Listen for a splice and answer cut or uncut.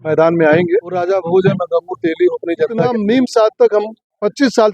cut